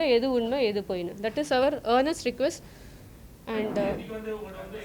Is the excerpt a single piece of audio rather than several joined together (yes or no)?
yes